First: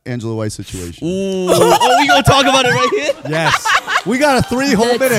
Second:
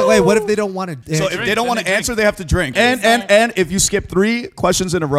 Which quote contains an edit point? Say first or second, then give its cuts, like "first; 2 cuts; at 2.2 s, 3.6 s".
second; 2 cuts; at 1.0 s, 2.7 s